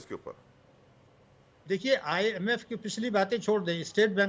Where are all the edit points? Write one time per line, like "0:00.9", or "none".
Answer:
none